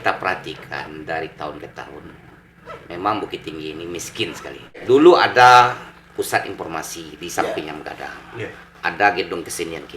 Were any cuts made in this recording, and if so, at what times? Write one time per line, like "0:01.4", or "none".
0:04.8